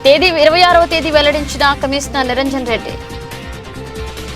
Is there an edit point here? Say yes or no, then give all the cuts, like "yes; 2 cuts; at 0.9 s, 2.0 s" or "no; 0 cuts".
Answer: yes; 1 cut; at 2.8 s